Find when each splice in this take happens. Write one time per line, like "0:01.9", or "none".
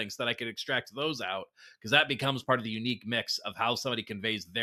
none